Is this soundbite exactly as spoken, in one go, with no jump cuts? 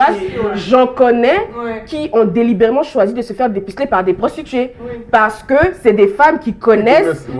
yes; 0 cuts

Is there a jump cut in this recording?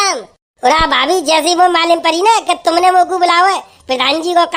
no; 0 cuts

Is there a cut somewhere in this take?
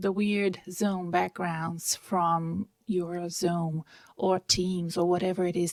no; 0 cuts

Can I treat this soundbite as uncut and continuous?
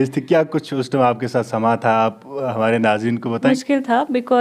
no; 1 cut; at 3.5 s

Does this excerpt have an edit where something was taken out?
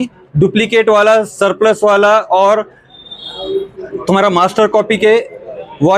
no; 0 cuts

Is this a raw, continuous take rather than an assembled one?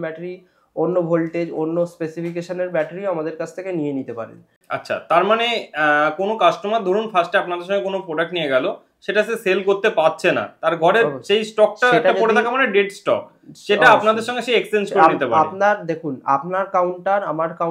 yes; 0 cuts

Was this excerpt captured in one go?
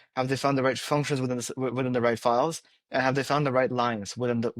yes; 0 cuts

